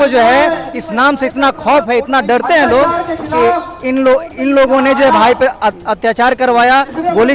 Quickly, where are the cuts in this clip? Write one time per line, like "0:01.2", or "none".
none